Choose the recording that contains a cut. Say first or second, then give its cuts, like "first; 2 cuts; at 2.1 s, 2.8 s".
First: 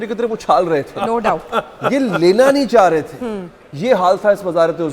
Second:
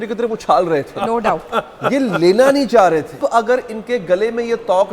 second; 1 cut; at 3.2 s